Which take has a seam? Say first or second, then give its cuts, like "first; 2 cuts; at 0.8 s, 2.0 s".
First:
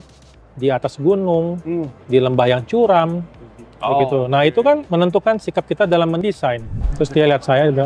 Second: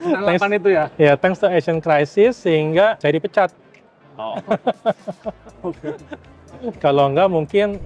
first; 1 cut; at 6.8 s